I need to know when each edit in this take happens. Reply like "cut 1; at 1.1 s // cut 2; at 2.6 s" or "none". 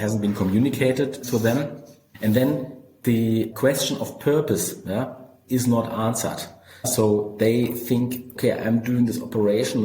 cut 1; at 1.5 s // cut 2; at 3.5 s // cut 3; at 5.3 s // cut 4; at 6.9 s // cut 5; at 8.3 s